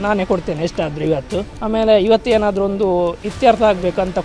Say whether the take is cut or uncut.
cut